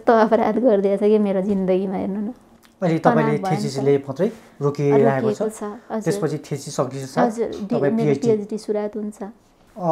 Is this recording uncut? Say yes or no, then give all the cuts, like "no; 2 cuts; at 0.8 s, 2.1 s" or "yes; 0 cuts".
yes; 0 cuts